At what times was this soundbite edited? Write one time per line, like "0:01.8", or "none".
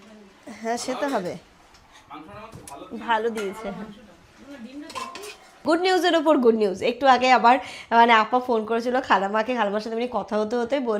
0:05.6